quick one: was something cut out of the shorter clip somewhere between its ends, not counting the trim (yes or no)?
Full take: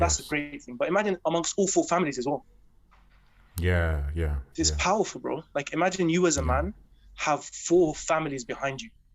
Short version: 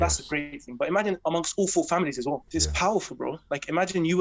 yes